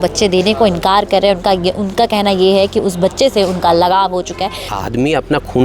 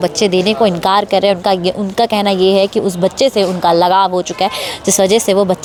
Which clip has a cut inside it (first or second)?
first